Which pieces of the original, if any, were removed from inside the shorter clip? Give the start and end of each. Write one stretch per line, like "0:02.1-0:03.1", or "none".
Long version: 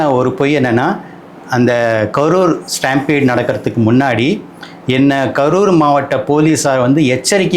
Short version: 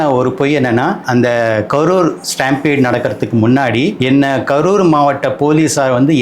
0:01.0-0:01.5
0:04.4-0:04.8